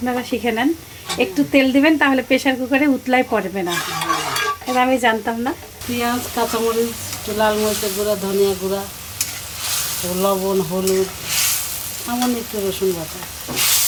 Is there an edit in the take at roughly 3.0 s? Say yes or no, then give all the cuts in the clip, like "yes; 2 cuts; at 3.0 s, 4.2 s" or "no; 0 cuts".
no; 0 cuts